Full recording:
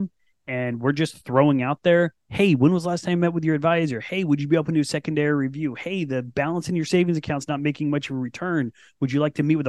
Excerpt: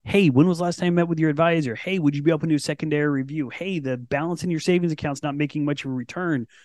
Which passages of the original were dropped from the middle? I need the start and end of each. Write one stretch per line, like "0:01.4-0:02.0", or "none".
none